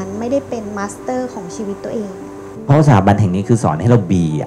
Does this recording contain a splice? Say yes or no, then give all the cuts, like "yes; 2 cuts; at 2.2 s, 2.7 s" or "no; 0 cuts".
yes; 1 cut; at 2.6 s